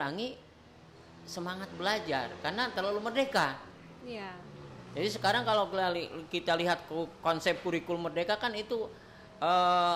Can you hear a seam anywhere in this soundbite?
no; 0 cuts

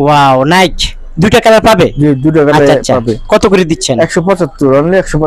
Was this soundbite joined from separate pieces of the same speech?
no; 0 cuts

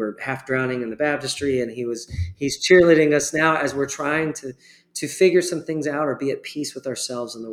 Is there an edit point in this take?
no; 0 cuts

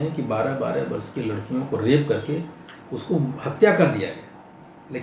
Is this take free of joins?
yes; 0 cuts

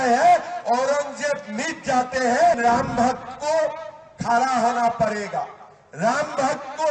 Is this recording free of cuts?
no; 1 cut; at 2.6 s

